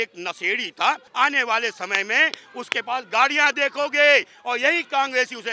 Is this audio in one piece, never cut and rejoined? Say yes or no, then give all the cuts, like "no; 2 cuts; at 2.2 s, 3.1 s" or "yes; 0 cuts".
no; 1 cut; at 1.1 s